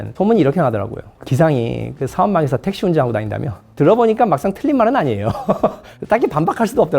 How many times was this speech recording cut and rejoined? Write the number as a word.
one